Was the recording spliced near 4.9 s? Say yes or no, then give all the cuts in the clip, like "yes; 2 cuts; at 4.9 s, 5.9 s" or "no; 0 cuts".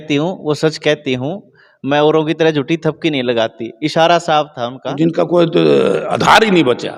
yes; 1 cut; at 4.9 s